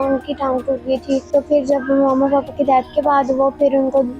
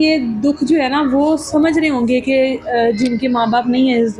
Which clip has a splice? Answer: first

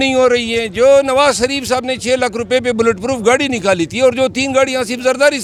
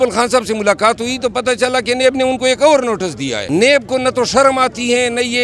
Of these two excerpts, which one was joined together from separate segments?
second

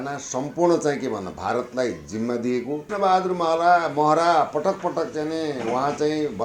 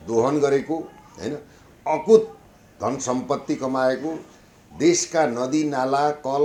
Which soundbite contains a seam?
first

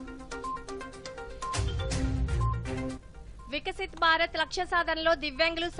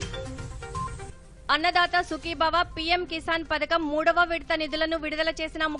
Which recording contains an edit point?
second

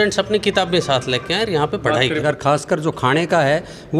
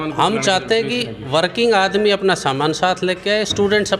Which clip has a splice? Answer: first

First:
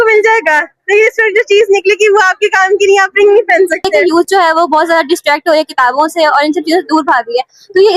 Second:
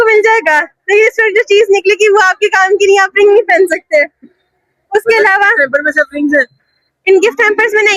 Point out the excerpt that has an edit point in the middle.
first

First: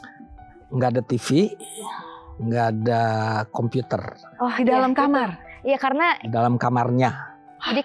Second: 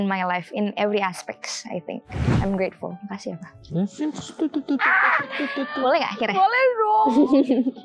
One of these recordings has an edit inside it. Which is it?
second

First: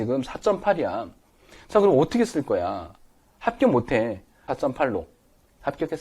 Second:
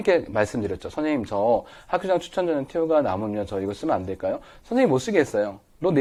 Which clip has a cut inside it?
first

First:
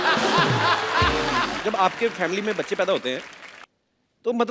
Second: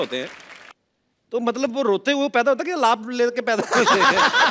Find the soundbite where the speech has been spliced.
first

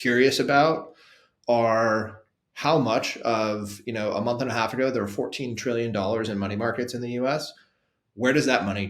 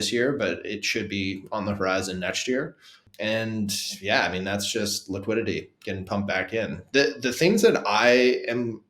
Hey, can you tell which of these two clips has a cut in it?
second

